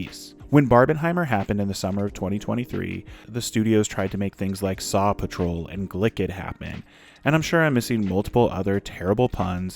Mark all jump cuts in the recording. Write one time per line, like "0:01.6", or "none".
0:03.2